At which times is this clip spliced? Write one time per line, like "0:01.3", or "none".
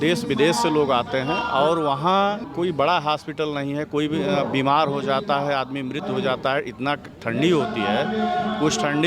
0:02.4